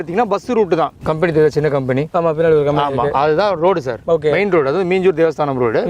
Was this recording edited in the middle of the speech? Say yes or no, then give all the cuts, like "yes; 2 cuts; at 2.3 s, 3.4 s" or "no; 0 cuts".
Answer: yes; 1 cut; at 1.0 s